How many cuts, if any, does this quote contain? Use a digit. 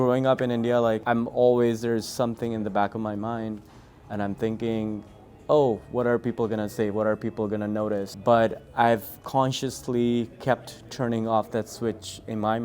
2